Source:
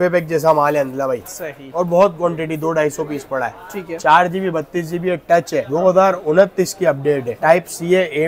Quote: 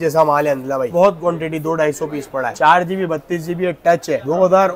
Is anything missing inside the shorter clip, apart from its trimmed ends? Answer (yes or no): yes